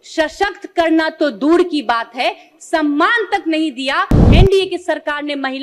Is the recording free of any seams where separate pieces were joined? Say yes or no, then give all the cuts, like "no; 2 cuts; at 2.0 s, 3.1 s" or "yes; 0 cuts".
no; 1 cut; at 4.3 s